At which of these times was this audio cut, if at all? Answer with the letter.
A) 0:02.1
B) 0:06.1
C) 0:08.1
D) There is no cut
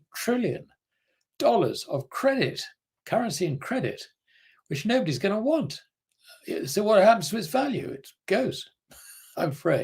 C